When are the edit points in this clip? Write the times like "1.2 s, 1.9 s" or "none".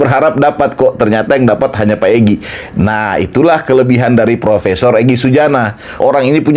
none